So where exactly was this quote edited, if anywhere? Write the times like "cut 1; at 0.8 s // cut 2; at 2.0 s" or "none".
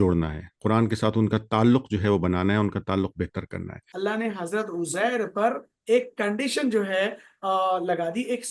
cut 1; at 3.8 s